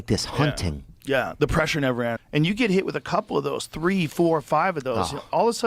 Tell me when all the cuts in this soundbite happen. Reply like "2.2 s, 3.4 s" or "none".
2.2 s